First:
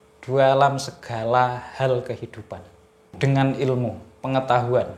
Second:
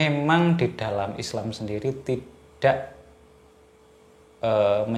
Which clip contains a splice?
first; 1 cut; at 3.1 s

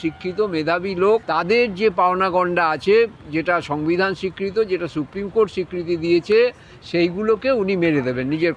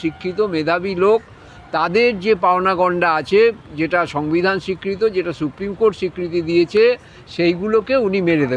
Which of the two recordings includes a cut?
first; 1 cut; at 1.3 s

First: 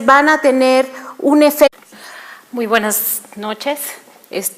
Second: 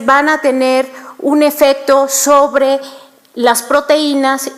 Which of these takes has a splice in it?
second; 1 cut; at 1.7 s

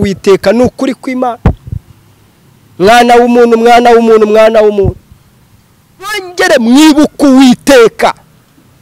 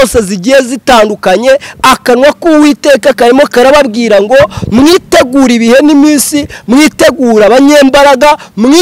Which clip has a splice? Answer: first; 1 cut; at 6.3 s

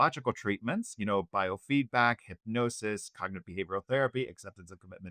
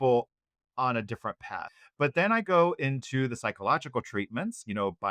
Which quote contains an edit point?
second; 1 cut; at 1.8 s

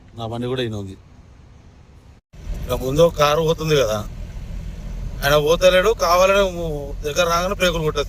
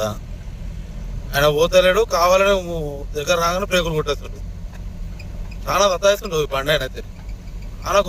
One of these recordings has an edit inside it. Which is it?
first; 1 cut; at 2.3 s

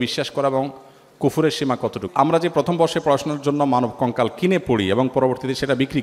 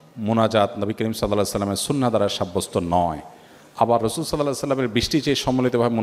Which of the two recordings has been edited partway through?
first; 1 cut; at 2.0 s

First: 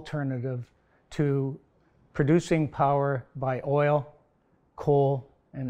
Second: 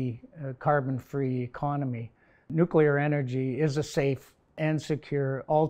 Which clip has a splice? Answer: second; 2 cuts; at 2.5 s, 4.6 s

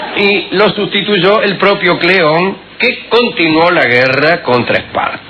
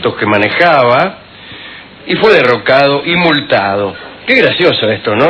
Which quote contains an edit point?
second; 1 cut; at 1.3 s

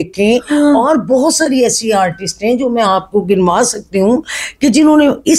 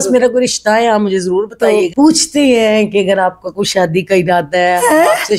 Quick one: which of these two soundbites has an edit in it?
second; 1 cut; at 1.9 s

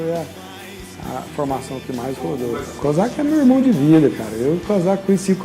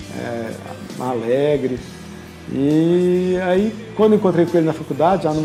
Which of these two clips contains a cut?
first; 1 cut; at 2.6 s

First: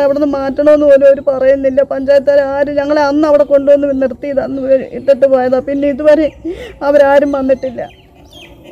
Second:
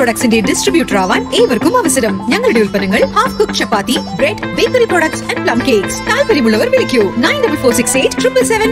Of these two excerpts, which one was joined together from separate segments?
first; 1 cut; at 7.8 s

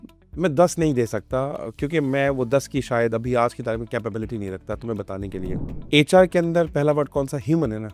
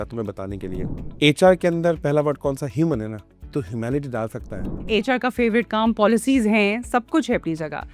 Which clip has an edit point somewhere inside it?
second; 1 cut; at 4.7 s

